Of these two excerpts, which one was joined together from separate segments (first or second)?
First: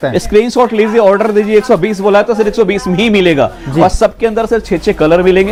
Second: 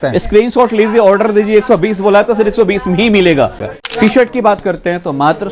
second